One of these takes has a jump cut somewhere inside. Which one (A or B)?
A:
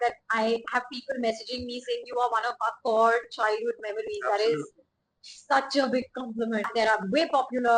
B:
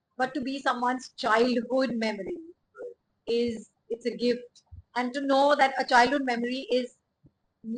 A